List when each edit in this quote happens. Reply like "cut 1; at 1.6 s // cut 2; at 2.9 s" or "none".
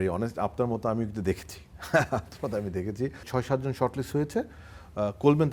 cut 1; at 3.2 s